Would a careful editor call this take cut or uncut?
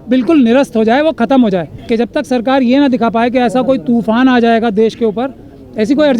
cut